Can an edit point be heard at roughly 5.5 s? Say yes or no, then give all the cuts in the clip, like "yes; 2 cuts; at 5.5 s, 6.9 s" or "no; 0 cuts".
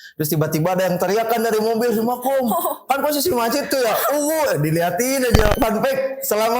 yes; 1 cut; at 5.5 s